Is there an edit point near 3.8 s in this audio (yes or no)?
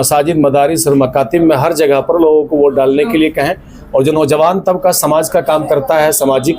no